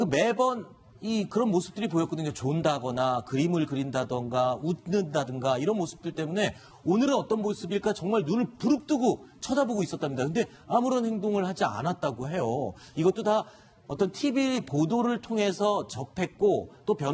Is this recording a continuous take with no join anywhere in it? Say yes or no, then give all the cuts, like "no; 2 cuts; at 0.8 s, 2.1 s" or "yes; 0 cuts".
no; 1 cut; at 11.7 s